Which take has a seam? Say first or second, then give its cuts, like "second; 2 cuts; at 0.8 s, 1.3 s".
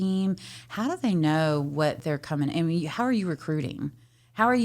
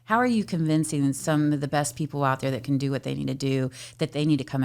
first; 1 cut; at 2.0 s